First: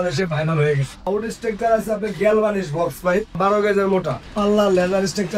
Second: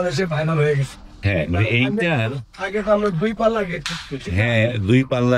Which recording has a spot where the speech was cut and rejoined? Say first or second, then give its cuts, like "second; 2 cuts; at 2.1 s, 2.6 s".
first; 3 cuts; at 0.9 s, 3.3 s, 4.2 s